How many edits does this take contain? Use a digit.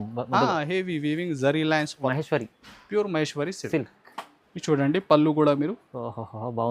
1